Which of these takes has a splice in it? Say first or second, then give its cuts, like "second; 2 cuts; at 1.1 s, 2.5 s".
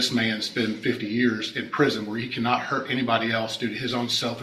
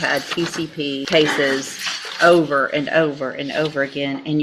second; 1 cut; at 1.1 s